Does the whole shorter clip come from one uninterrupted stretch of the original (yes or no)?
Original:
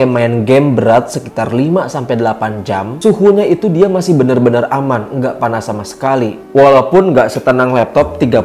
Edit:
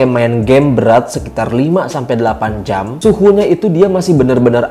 yes